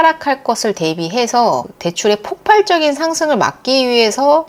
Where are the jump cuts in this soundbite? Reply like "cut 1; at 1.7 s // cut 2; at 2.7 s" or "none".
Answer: cut 1; at 1.7 s